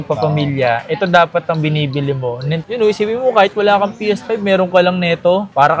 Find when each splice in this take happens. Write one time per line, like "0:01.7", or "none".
0:02.6